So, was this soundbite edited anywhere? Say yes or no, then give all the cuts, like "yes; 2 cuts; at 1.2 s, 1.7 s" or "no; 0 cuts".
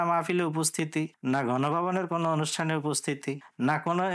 no; 0 cuts